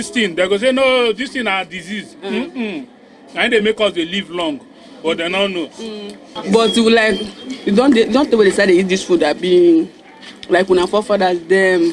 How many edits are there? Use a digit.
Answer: 1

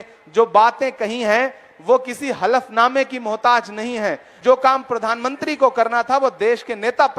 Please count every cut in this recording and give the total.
1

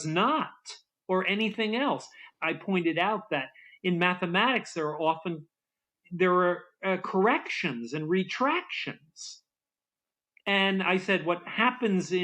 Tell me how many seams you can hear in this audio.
1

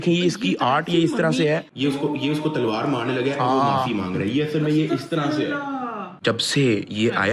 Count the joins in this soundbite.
1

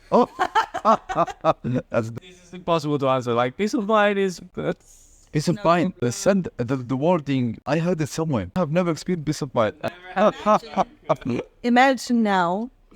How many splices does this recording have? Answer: 6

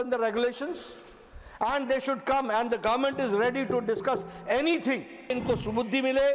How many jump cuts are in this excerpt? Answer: 1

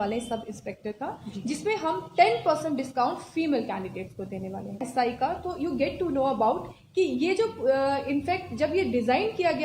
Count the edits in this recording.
1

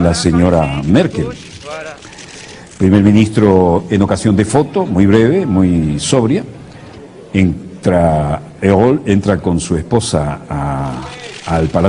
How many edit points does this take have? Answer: 1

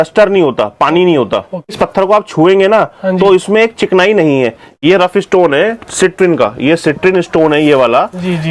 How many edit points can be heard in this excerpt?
1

